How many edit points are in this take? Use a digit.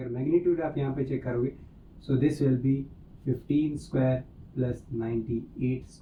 0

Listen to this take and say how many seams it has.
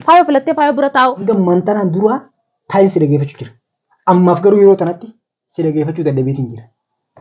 1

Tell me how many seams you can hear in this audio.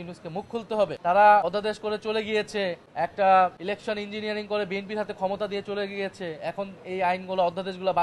4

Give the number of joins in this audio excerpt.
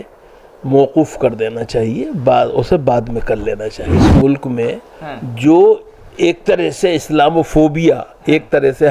1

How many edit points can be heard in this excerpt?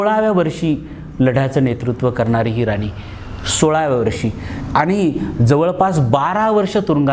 0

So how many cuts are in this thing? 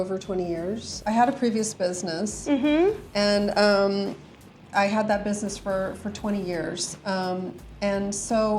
2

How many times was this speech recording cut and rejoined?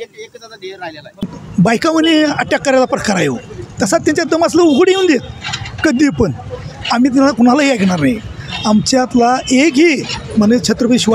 1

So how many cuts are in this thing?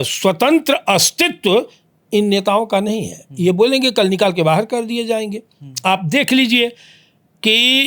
0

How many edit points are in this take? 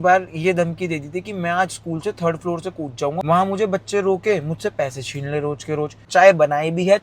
2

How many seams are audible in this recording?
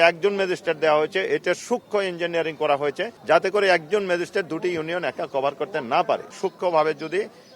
2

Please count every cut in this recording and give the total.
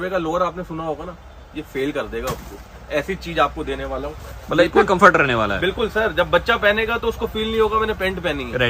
0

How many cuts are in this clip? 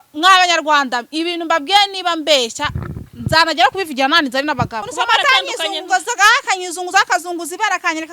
1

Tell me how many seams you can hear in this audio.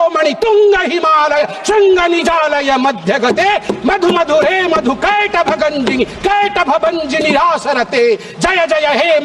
0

